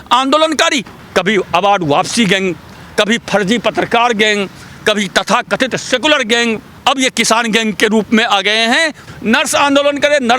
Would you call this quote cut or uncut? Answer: cut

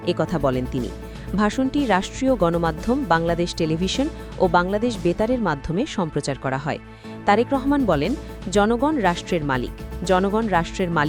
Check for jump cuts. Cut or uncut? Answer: uncut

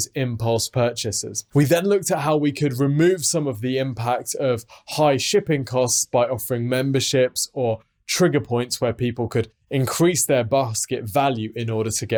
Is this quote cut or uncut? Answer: uncut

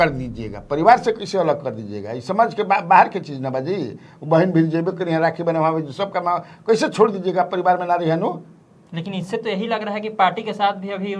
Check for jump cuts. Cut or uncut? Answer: uncut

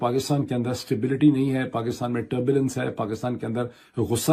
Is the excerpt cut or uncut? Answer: uncut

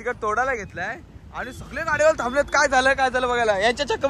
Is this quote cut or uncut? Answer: uncut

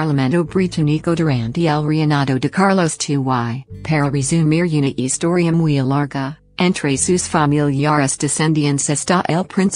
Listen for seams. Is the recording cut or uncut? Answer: uncut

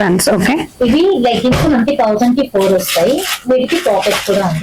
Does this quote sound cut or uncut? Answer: uncut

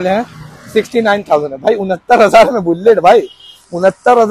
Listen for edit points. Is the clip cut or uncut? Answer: uncut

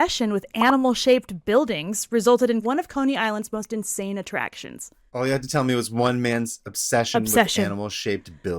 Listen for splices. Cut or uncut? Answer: cut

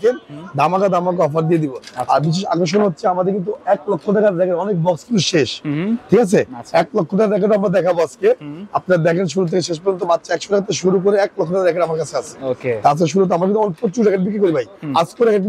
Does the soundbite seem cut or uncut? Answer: uncut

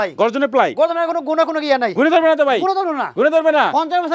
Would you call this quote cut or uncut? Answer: uncut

